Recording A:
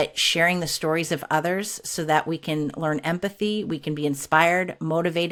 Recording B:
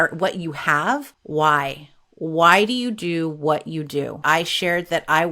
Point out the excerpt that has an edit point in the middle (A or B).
B